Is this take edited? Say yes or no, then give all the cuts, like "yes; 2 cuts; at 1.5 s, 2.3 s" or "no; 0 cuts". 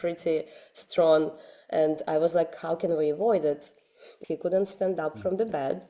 yes; 1 cut; at 4.1 s